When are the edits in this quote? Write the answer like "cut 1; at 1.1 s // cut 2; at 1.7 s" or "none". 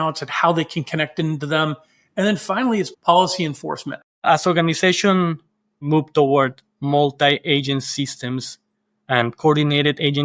cut 1; at 4.2 s // cut 2; at 5.8 s